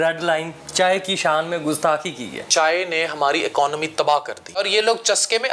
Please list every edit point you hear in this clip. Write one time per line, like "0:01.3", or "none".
0:02.5
0:04.6